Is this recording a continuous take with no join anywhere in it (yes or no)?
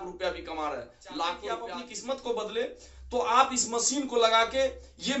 no